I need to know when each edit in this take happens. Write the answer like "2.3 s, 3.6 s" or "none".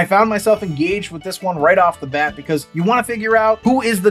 none